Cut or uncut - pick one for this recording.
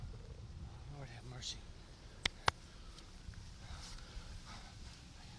cut